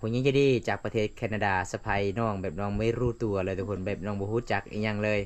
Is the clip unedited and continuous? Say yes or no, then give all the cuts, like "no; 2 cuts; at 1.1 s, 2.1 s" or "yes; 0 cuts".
yes; 0 cuts